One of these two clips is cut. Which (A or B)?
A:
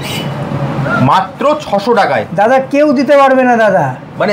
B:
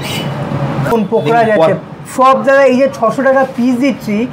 B